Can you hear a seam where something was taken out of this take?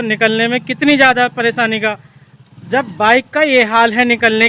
no; 0 cuts

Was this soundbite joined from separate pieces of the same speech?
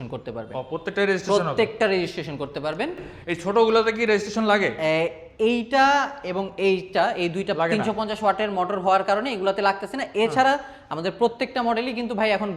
no; 0 cuts

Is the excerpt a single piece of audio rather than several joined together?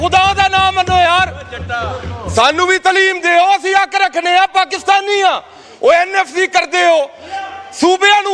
yes; 0 cuts

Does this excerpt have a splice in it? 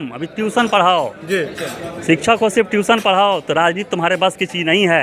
no; 0 cuts

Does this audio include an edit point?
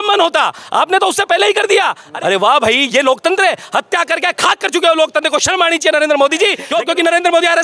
yes; 2 cuts; at 2.0 s, 6.6 s

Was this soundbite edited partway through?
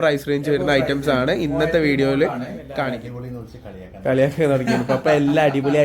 yes; 1 cut; at 2.9 s

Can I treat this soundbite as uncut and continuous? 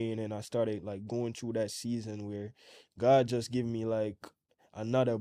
yes; 0 cuts

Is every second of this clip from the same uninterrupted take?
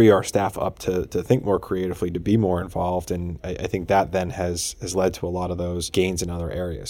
no; 1 cut; at 5.9 s

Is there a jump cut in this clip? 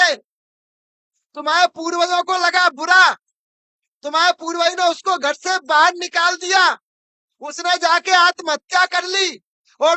no; 0 cuts

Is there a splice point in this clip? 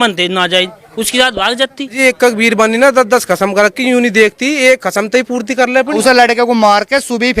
yes; 2 cuts; at 2.0 s, 6.0 s

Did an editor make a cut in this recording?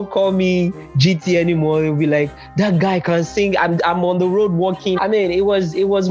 yes; 1 cut; at 5.0 s

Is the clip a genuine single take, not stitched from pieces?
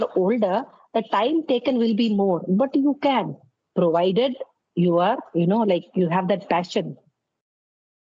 yes; 0 cuts

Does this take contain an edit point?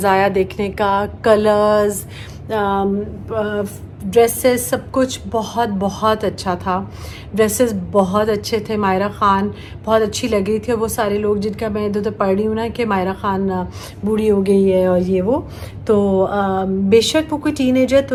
no; 0 cuts

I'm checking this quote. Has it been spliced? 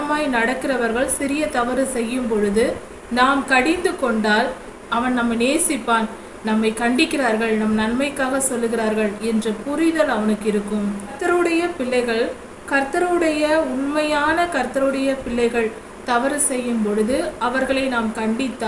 yes; 2 cuts; at 4.7 s, 11.2 s

